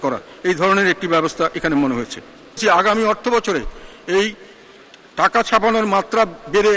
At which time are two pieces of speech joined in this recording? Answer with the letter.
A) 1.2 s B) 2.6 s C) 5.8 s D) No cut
B